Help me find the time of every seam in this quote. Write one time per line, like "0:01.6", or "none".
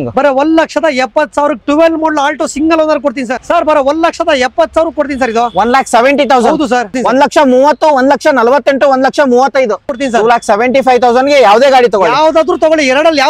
0:03.4
0:06.9
0:09.8